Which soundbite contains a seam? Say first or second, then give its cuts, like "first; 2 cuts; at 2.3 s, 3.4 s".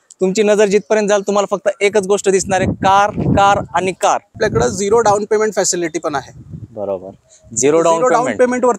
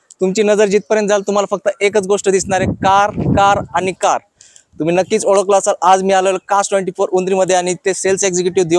first; 1 cut; at 4.4 s